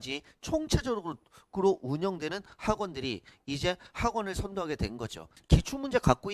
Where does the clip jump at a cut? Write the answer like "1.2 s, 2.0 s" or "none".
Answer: 5.3 s